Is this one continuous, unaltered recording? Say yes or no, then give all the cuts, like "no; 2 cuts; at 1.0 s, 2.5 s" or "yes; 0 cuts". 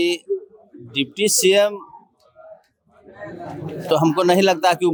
yes; 0 cuts